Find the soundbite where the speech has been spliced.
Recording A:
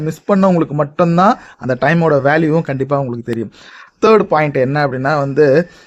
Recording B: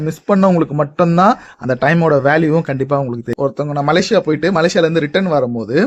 B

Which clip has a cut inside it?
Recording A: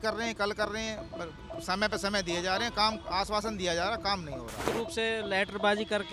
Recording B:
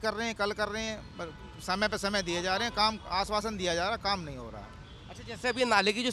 A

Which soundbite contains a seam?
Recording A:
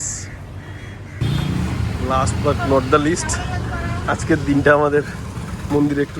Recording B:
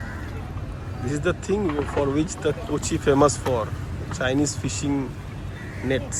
A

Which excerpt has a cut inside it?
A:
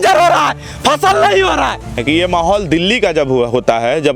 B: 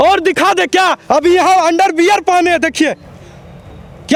A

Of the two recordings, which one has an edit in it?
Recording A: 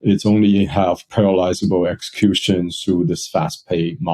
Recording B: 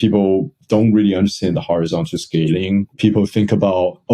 B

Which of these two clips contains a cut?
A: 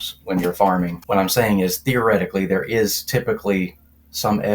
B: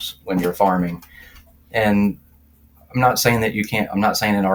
A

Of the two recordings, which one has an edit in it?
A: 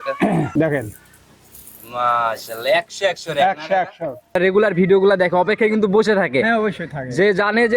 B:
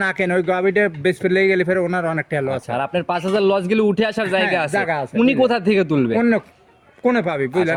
A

